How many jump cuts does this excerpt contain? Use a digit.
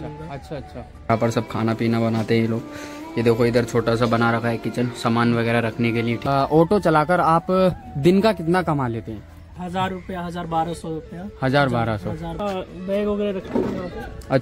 4